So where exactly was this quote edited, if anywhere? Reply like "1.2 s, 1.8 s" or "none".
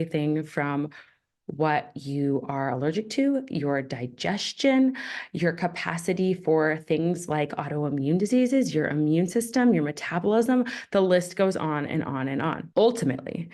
12.6 s